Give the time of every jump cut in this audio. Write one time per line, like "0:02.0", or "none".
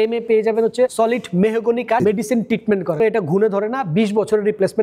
0:00.9
0:02.0
0:03.0